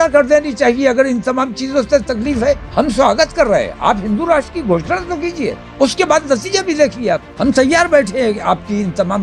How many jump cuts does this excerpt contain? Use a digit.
3